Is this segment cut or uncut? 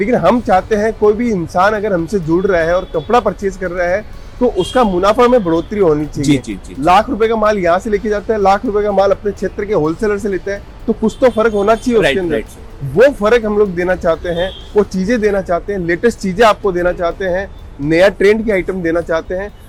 uncut